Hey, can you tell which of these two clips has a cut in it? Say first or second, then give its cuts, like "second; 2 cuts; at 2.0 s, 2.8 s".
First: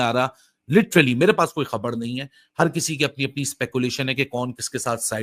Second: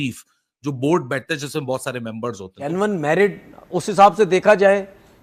second; 1 cut; at 2.6 s